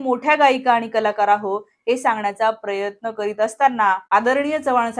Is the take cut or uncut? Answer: cut